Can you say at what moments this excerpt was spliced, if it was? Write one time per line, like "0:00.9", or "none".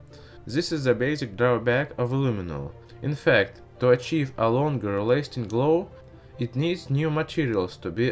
0:01.6